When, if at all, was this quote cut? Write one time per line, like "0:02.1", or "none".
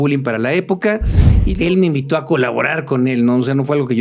0:01.4